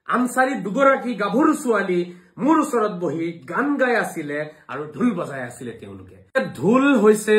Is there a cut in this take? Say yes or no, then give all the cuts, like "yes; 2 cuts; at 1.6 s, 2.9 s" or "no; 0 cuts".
yes; 1 cut; at 6.4 s